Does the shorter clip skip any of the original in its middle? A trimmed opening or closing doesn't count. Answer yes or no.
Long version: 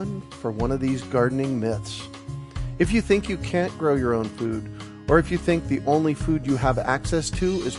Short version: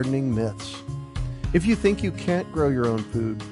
no